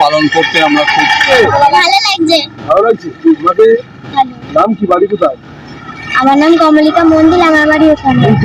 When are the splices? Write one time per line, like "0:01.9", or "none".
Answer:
0:01.2